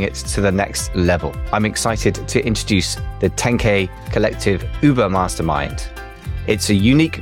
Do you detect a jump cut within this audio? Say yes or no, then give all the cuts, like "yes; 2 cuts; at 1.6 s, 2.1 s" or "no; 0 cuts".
no; 0 cuts